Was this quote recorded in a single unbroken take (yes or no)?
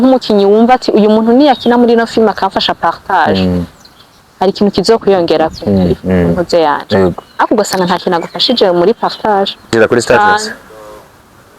no